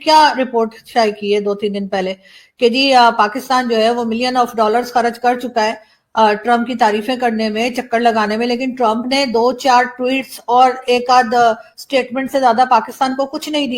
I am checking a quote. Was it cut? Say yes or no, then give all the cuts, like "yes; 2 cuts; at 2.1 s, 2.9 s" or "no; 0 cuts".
no; 0 cuts